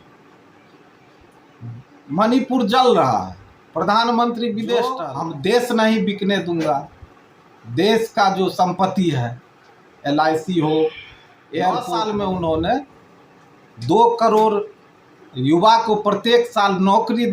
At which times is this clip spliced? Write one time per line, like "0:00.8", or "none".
0:05.1
0:11.9

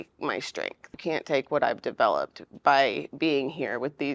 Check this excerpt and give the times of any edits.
0:01.0

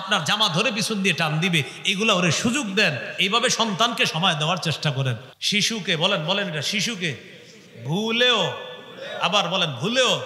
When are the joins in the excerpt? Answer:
0:05.2

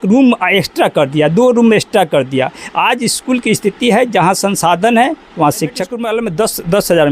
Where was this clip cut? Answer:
0:05.9

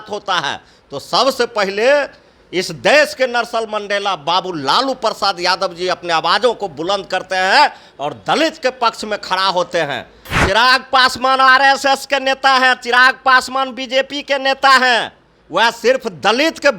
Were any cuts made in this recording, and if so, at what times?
0:10.2

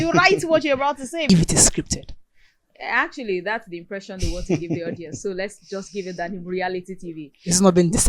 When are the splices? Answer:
0:01.3

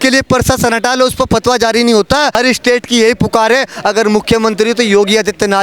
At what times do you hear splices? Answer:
0:02.3

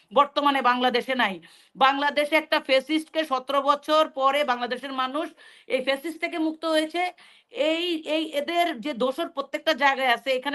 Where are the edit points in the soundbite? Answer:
none

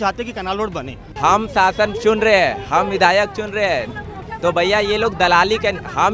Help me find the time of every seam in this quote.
0:01.1

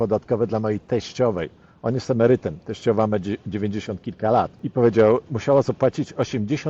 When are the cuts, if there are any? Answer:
0:04.6
0:05.3

